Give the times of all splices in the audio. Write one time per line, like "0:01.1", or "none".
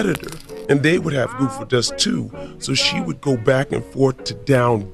none